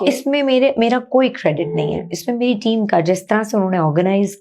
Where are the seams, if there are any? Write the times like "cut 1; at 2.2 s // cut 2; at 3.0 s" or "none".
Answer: none